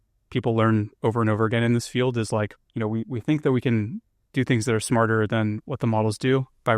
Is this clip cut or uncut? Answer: cut